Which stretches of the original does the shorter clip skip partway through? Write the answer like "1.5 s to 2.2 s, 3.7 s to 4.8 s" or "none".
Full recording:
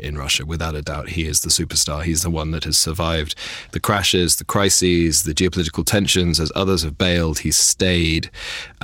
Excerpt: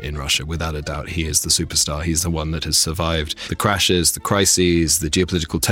3.4 s to 3.6 s